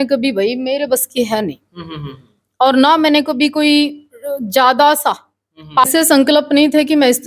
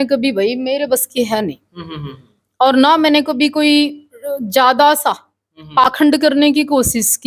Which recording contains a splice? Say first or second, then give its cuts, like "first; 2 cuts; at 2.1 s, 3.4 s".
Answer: first; 1 cut; at 5.8 s